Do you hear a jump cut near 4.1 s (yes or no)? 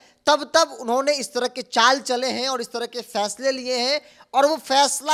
no